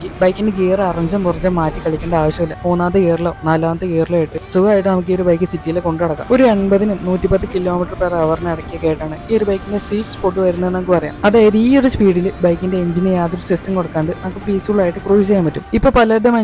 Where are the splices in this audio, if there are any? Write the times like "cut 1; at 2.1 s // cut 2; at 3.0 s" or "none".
none